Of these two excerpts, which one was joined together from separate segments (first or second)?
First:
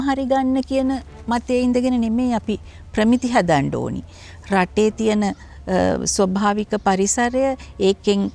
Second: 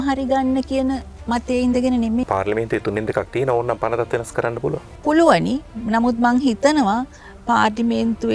second